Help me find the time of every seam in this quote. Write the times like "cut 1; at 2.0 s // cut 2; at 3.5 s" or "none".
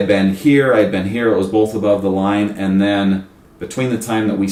none